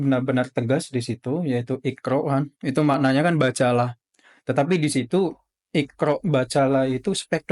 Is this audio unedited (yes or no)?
yes